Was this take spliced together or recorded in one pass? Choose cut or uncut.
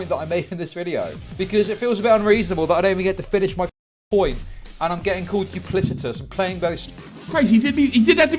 uncut